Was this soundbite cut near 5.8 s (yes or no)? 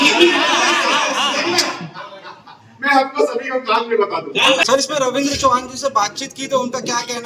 no